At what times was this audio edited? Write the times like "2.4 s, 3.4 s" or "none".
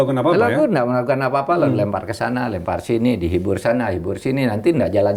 none